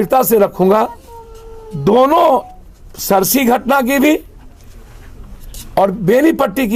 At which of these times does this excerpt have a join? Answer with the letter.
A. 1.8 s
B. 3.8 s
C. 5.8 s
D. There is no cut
D